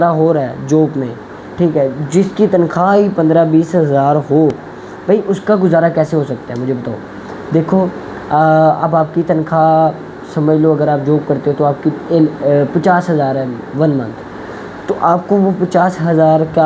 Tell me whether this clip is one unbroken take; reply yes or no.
yes